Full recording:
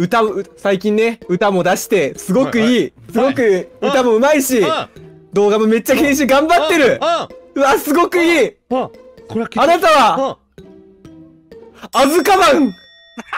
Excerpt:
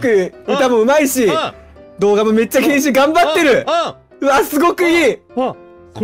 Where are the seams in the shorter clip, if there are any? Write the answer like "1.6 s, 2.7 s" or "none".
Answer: none

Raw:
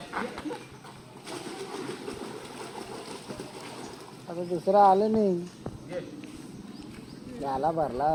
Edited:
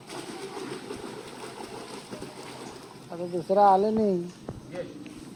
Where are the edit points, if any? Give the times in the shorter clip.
none

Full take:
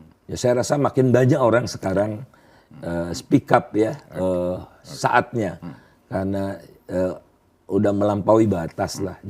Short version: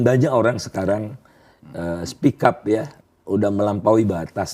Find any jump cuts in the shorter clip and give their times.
3.0 s

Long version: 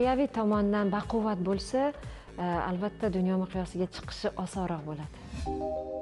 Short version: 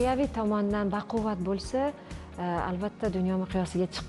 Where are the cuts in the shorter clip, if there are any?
none

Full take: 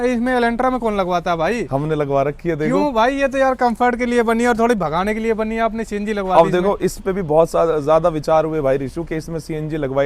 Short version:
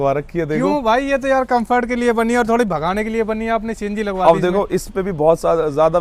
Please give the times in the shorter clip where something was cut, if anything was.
none

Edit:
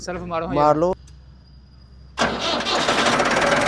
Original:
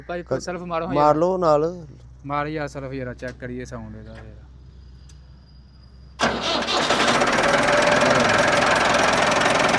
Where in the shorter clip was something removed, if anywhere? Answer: 0.9 s

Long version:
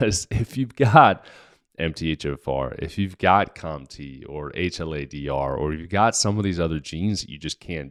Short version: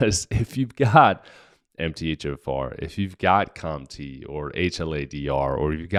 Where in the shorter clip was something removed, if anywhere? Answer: none

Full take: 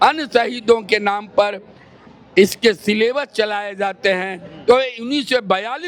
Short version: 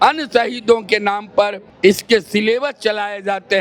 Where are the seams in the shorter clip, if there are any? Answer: 1.6 s

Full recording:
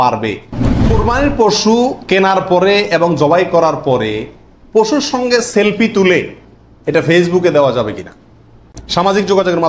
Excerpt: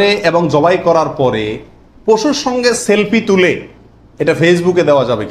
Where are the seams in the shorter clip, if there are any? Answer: none

